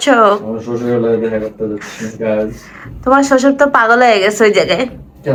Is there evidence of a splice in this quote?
no; 0 cuts

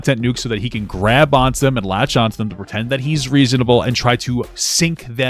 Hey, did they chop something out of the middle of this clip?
no; 0 cuts

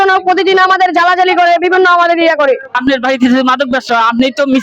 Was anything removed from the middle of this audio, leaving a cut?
yes; 1 cut; at 2.7 s

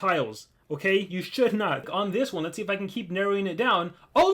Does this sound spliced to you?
yes; 1 cut; at 1.9 s

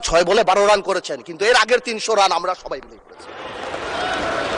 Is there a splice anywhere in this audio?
no; 0 cuts

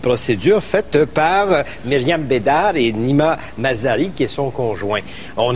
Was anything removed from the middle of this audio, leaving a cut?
yes; 1 cut; at 4.1 s

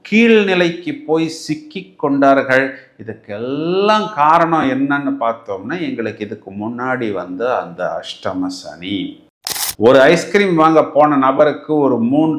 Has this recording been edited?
yes; 1 cut; at 9.7 s

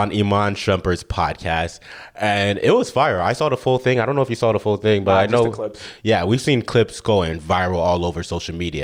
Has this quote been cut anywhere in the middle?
no; 0 cuts

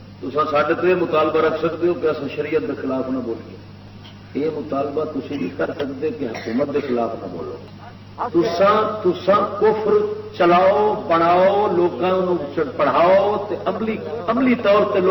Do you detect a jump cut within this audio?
no; 0 cuts

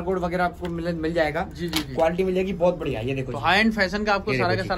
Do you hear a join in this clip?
no; 0 cuts

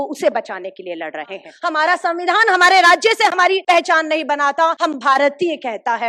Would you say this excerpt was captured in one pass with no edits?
no; 3 cuts; at 1.4 s, 3.6 s, 4.8 s

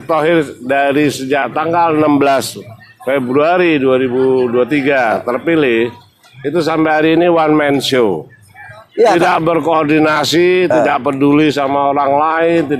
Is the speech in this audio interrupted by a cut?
no; 0 cuts

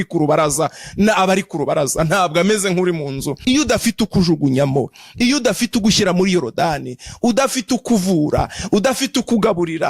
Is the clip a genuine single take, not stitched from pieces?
no; 1 cut; at 3.3 s

